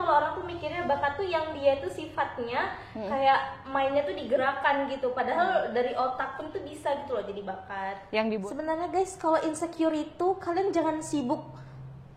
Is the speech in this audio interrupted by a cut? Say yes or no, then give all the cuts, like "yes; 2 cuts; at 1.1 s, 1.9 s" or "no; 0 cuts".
yes; 1 cut; at 8.3 s